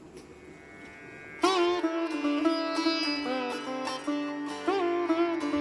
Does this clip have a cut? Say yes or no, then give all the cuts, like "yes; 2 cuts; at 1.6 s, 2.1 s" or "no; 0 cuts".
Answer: no; 0 cuts